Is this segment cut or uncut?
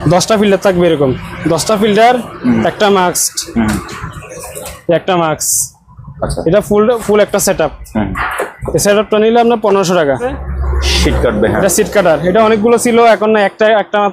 cut